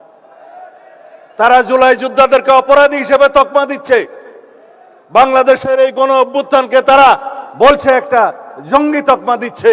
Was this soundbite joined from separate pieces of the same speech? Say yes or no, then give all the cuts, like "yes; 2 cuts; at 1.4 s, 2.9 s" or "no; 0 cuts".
no; 0 cuts